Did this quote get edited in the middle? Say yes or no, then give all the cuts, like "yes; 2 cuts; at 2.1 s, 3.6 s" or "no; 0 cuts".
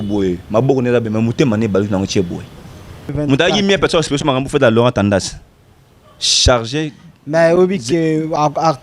yes; 1 cut; at 3.1 s